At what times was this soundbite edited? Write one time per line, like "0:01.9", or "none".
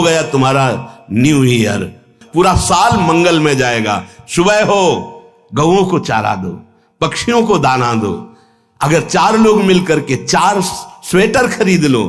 0:02.2